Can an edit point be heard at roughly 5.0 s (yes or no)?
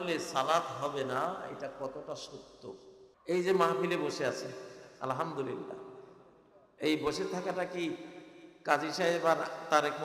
no